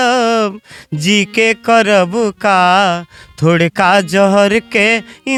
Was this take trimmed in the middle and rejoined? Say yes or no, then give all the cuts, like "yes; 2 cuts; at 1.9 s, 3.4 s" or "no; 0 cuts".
no; 0 cuts